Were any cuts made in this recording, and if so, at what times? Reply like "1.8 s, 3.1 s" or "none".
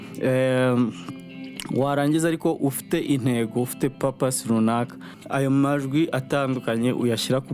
5.2 s